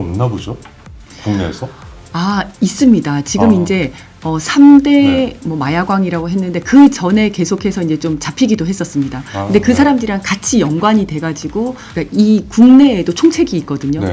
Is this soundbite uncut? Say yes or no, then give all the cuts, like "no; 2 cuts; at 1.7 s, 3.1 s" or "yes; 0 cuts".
no; 1 cut; at 11.9 s